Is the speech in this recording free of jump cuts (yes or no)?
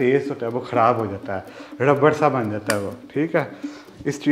yes